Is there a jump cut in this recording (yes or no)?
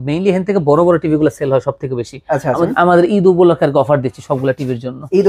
yes